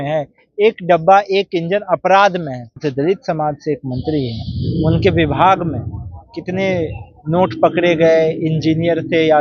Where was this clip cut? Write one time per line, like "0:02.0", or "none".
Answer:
0:02.8